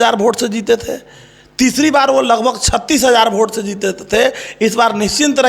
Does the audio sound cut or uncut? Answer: uncut